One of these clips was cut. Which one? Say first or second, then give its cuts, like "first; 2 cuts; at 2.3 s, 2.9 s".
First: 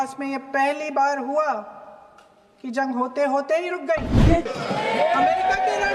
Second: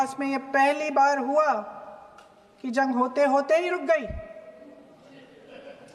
first; 1 cut; at 4.4 s